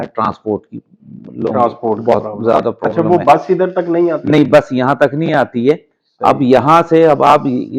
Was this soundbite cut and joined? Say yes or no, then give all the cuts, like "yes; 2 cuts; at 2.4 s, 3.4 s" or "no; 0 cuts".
no; 0 cuts